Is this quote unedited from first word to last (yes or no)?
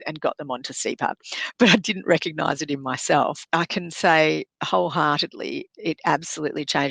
no